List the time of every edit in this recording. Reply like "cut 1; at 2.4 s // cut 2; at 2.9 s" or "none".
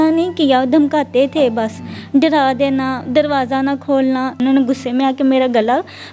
cut 1; at 4.4 s